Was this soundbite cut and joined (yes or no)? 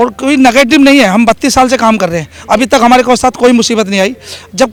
no